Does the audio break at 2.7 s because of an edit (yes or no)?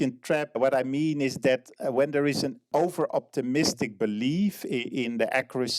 yes